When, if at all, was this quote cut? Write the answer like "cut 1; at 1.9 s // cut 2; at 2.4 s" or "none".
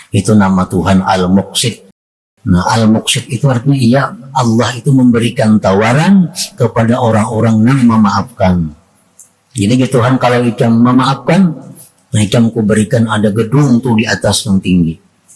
cut 1; at 1.9 s